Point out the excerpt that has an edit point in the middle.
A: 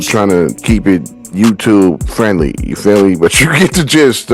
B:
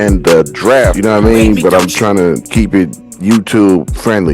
B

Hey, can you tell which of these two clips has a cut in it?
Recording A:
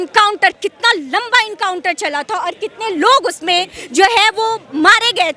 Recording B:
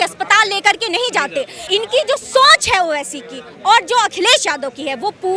B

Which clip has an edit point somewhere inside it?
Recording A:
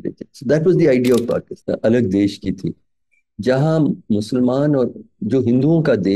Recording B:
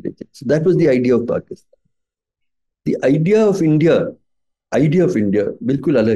A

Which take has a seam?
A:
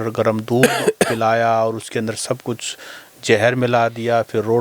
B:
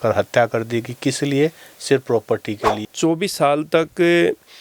B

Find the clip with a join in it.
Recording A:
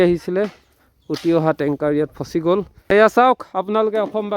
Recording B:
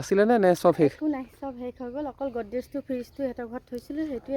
A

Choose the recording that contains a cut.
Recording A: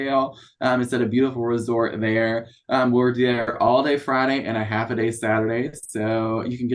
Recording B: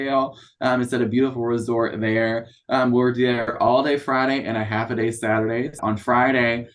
B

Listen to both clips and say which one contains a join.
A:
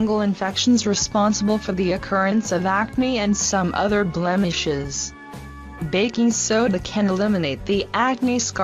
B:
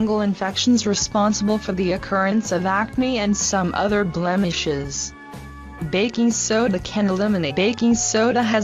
A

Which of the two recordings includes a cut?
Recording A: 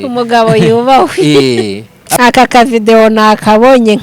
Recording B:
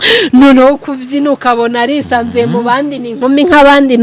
A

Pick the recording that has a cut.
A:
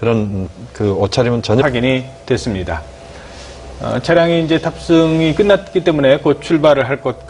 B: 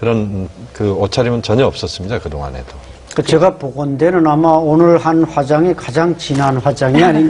B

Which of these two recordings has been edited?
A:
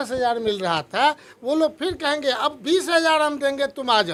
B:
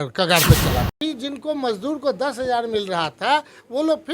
B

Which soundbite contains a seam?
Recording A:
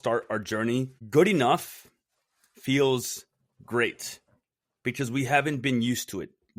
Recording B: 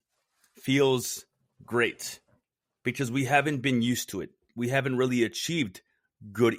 A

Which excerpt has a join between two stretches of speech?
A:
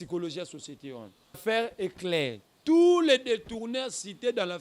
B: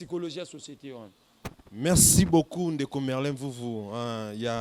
A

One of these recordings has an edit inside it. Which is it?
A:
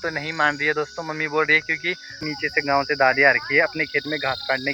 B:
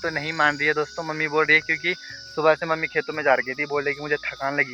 A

